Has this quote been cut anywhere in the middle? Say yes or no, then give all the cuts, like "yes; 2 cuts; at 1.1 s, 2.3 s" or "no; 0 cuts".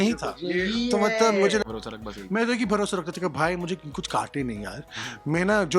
yes; 1 cut; at 1.7 s